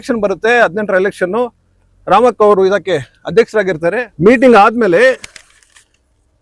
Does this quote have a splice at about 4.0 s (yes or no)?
yes